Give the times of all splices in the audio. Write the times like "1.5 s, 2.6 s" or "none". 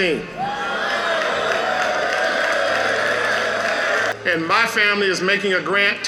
4.1 s

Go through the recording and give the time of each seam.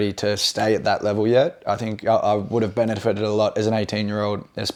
none

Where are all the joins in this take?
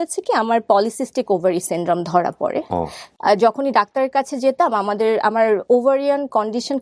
3.0 s

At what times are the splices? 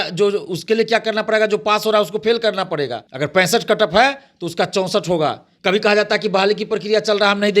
3.0 s, 5.5 s

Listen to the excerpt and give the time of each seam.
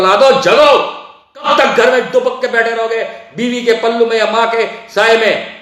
1.5 s

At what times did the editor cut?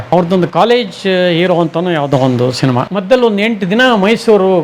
2.9 s

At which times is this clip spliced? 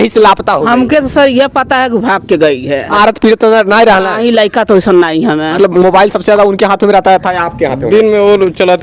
2.9 s, 5.6 s

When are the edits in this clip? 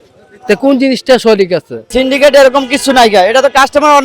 1.8 s

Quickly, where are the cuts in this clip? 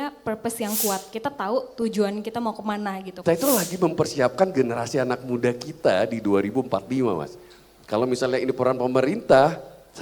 3.1 s

